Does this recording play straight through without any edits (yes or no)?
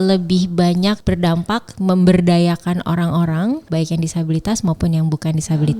no